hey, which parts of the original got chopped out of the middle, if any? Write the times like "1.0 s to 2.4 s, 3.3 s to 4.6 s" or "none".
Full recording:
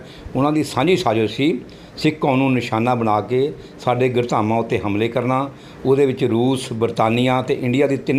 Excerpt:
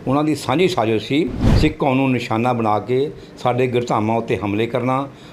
1.7 s to 1.8 s